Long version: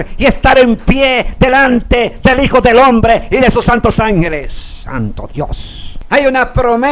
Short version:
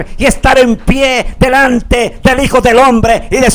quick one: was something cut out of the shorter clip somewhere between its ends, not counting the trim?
no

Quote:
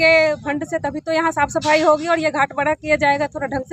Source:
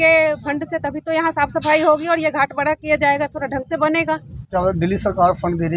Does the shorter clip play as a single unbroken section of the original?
yes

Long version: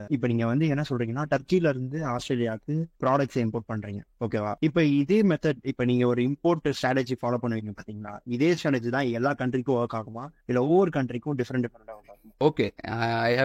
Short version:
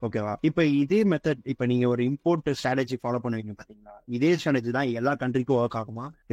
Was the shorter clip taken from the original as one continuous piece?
yes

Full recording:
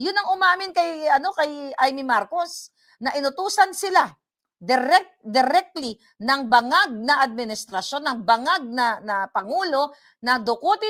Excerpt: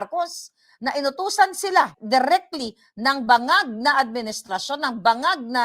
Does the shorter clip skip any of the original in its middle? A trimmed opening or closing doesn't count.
yes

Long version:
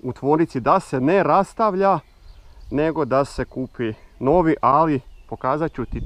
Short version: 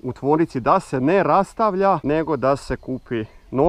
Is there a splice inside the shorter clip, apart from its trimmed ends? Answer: yes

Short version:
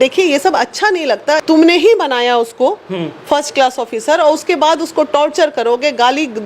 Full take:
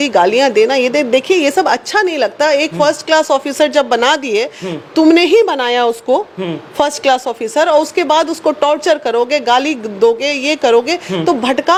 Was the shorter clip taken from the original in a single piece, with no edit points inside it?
no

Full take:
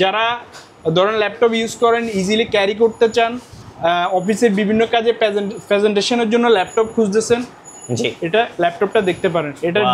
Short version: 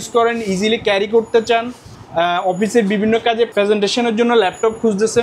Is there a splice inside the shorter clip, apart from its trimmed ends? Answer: yes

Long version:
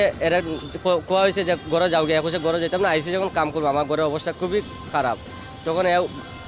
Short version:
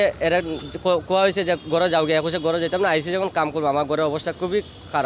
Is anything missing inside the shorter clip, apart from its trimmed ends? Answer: no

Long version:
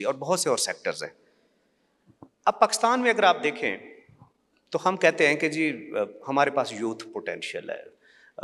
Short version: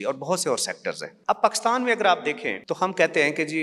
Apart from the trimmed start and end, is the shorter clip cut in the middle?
yes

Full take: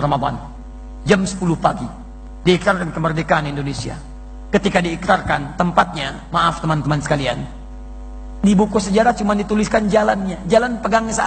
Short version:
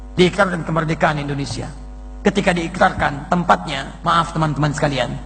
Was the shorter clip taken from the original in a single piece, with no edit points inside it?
yes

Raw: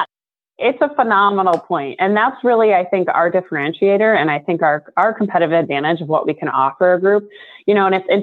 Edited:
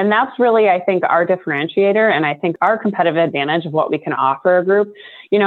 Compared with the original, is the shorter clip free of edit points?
no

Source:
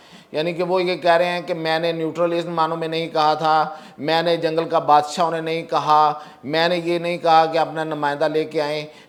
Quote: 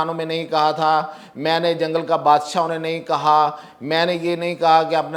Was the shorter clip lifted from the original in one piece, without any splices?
yes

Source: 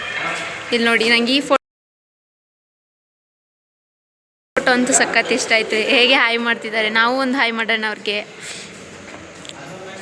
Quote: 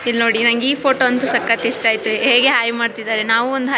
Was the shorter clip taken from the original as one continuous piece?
no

